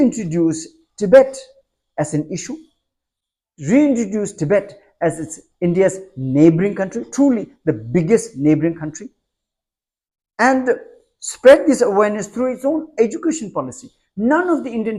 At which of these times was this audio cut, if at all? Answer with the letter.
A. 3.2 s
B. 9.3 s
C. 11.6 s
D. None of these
D